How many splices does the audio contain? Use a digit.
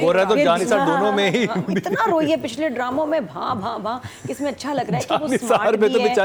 0